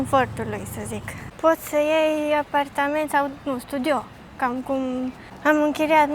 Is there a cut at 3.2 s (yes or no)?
no